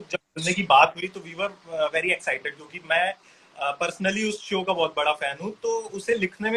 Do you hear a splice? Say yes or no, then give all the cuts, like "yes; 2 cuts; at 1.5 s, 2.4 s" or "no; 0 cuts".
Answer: no; 0 cuts